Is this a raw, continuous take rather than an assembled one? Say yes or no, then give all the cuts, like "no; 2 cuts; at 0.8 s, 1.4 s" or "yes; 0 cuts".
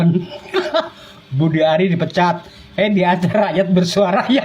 yes; 0 cuts